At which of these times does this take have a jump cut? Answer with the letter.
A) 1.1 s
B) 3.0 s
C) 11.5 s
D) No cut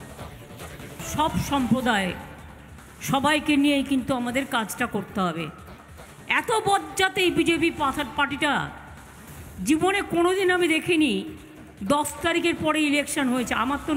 A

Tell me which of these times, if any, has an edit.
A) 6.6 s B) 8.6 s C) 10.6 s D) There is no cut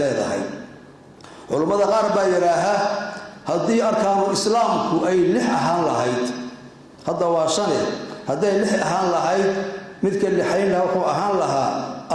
D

